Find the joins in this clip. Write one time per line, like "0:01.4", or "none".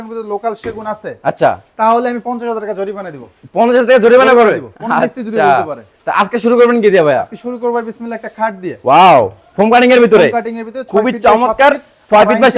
none